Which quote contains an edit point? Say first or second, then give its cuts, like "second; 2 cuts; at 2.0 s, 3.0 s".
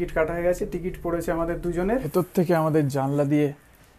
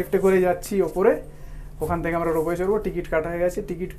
first; 1 cut; at 2.1 s